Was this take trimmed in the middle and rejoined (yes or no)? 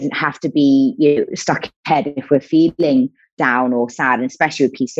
no